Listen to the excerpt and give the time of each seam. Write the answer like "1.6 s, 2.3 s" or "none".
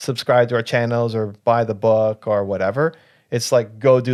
none